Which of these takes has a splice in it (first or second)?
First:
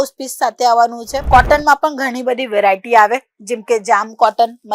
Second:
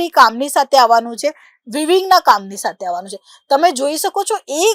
first